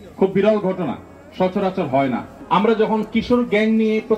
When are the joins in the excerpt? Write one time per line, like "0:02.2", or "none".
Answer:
0:02.3

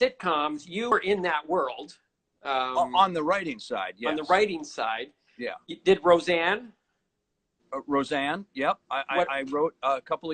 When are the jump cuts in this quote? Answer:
0:00.9

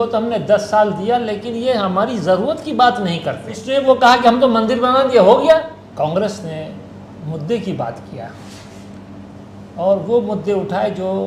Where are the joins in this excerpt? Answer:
0:03.6
0:05.8

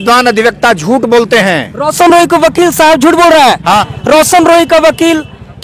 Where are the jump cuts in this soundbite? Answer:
0:03.9

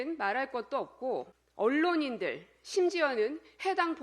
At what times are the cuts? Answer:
0:01.4

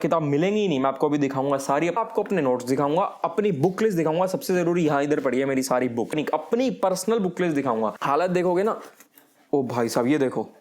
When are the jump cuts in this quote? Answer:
0:02.0
0:06.1
0:08.0

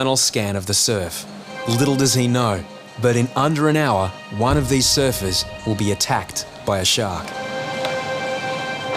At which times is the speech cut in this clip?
0:01.5
0:04.2
0:05.5
0:07.4

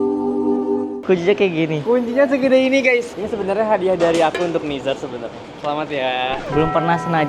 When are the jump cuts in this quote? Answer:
none

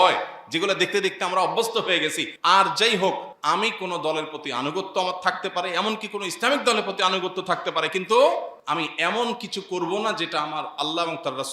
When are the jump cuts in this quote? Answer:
0:02.3
0:03.3
0:08.6

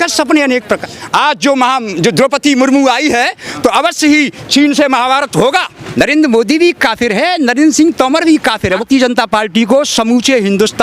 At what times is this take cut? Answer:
0:00.9
0:05.8
0:08.8

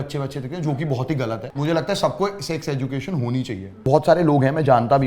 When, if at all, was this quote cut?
0:01.5
0:03.7

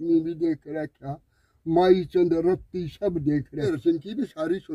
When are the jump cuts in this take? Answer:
0:03.7

